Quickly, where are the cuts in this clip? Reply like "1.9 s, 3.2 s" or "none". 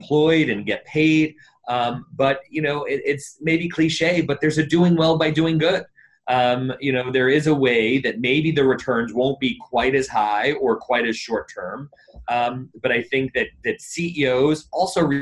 none